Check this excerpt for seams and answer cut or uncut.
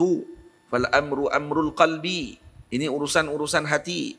uncut